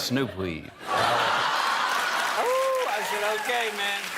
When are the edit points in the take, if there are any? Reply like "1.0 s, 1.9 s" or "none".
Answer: 2.4 s